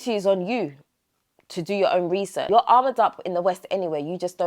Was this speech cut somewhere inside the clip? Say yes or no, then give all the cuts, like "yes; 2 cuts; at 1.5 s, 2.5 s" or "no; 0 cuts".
yes; 1 cut; at 2.5 s